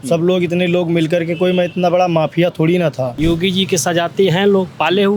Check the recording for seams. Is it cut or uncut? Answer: cut